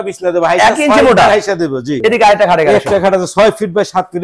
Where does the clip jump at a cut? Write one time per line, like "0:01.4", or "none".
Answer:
0:01.9